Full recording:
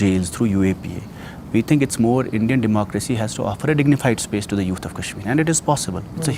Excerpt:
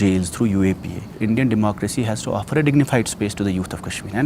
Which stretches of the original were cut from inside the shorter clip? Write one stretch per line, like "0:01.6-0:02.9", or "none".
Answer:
0:01.2-0:02.3